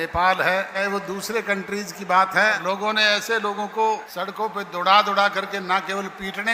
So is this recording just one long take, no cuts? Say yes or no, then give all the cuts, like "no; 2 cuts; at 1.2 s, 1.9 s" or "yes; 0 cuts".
no; 3 cuts; at 0.8 s, 2.6 s, 4.1 s